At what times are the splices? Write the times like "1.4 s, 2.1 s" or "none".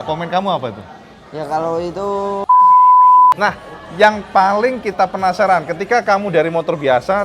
2.4 s, 3.4 s